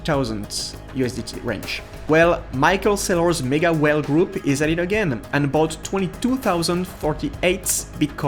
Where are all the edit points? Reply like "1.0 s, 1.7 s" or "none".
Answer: 1.9 s